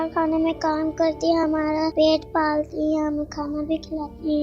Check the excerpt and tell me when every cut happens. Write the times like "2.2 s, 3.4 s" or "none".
1.9 s